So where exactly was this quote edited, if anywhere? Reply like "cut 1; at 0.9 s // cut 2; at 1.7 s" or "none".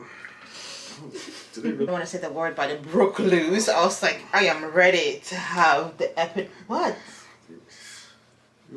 cut 1; at 1.9 s